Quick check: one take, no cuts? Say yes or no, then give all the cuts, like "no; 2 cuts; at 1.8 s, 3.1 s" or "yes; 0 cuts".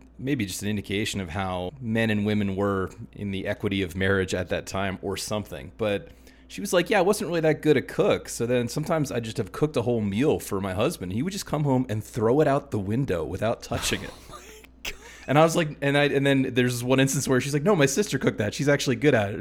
no; 1 cut; at 1.7 s